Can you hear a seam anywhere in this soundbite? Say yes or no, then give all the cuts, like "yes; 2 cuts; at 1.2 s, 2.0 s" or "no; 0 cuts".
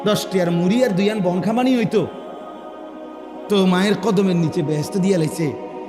no; 0 cuts